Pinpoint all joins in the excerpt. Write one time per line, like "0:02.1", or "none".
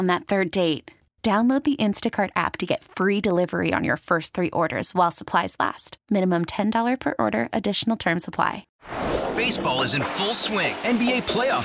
0:08.7